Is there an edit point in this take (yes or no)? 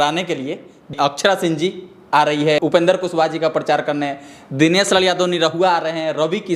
yes